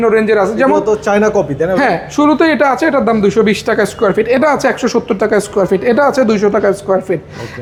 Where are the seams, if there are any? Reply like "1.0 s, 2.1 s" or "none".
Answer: none